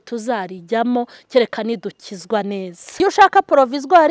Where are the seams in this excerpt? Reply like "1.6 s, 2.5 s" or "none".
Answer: 2.8 s